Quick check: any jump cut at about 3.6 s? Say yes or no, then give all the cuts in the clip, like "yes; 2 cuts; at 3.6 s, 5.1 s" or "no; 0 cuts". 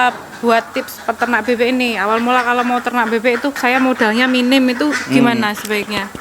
yes; 1 cut; at 3.6 s